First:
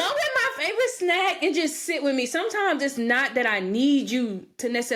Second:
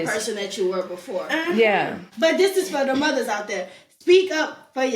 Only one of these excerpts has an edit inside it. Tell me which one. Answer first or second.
second